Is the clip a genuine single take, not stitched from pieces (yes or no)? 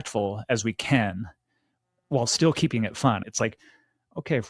no